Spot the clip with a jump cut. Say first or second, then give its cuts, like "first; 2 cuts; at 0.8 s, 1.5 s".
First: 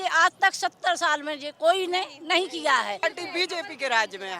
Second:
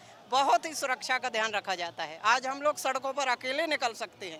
first; 1 cut; at 3.0 s